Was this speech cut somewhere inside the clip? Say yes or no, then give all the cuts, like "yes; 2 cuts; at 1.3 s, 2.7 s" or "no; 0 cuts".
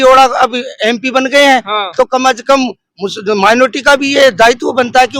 no; 0 cuts